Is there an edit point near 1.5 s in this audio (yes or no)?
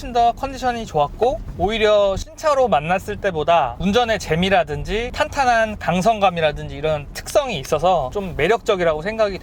no